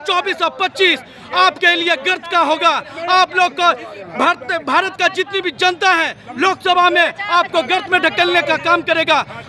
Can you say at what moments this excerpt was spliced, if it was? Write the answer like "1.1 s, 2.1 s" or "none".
none

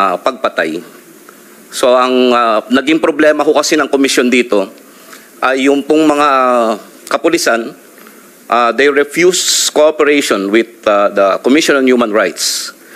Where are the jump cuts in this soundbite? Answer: none

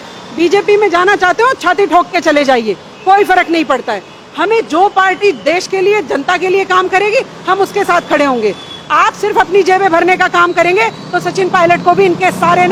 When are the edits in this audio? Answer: none

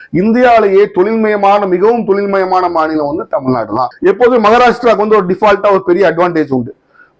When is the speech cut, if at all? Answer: 3.9 s

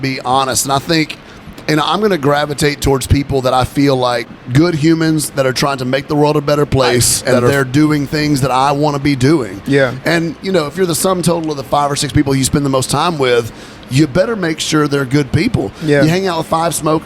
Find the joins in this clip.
4.3 s, 7.5 s

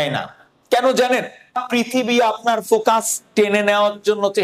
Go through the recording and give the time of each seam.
1.6 s

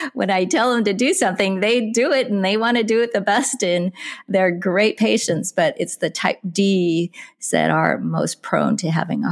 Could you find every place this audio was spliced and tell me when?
none

